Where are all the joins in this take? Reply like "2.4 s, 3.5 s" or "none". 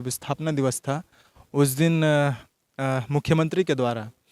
none